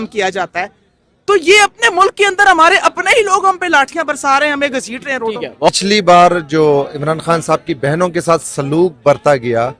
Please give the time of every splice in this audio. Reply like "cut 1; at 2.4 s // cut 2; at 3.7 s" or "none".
cut 1; at 5.7 s